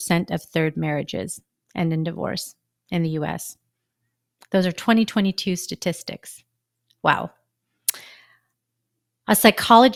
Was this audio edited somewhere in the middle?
no; 0 cuts

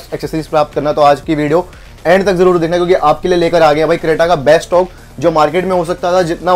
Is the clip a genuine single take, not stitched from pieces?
yes; 0 cuts

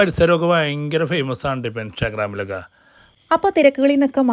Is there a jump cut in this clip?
yes; 1 cut; at 3.1 s

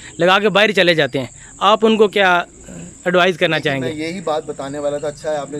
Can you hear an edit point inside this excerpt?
no; 0 cuts

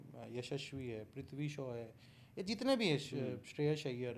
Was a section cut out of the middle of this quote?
no; 0 cuts

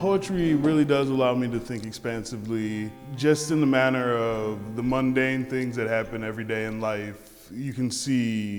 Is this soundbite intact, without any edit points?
yes; 0 cuts

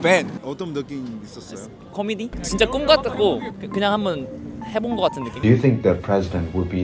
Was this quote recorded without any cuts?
no; 2 cuts; at 2.3 s, 5.3 s

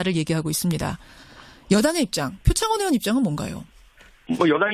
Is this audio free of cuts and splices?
no; 1 cut; at 2.7 s

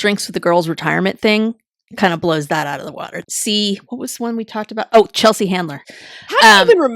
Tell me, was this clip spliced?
yes; 2 cuts; at 3.2 s, 5.8 s

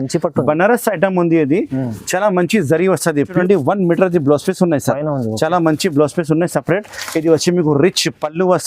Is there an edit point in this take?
yes; 1 cut; at 3.4 s

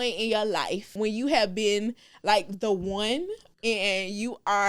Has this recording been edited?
yes; 2 cuts; at 0.9 s, 3.4 s

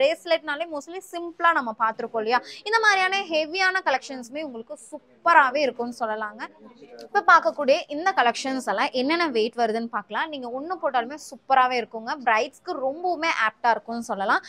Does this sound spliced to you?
no; 0 cuts

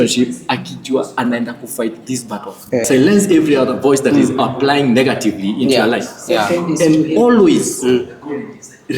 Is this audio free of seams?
no; 1 cut; at 2.9 s

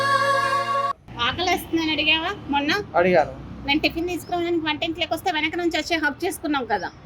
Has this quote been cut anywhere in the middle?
yes; 1 cut; at 1.1 s

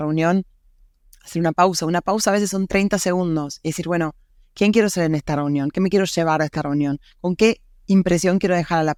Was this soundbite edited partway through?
no; 0 cuts

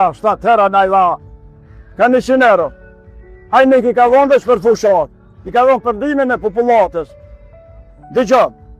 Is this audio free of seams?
yes; 0 cuts

